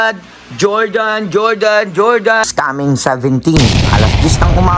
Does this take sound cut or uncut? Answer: cut